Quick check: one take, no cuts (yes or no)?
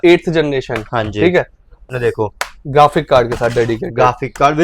no